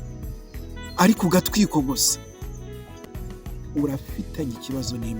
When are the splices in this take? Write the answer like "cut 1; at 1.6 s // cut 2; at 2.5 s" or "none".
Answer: cut 1; at 3.1 s